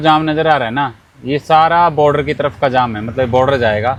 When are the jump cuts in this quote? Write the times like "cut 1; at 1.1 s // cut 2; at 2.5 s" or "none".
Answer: none

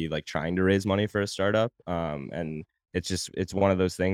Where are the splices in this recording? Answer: none

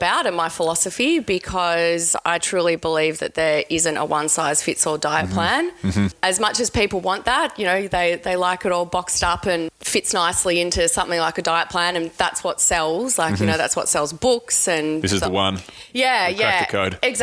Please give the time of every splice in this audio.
cut 1; at 6.2 s // cut 2; at 9.8 s

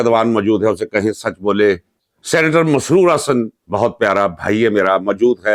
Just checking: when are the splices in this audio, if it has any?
none

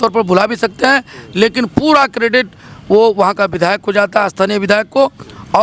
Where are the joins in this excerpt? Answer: none

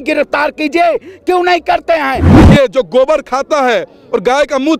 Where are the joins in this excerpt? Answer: cut 1; at 2.3 s

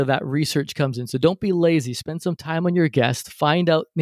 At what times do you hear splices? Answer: none

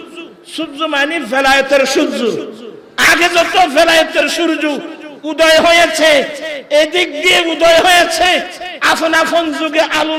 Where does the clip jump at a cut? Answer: none

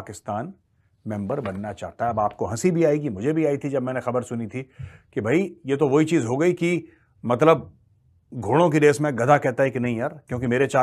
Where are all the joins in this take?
none

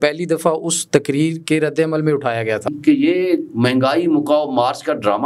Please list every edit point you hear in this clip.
cut 1; at 2.8 s

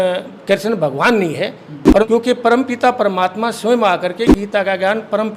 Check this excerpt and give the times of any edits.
cut 1; at 2.0 s

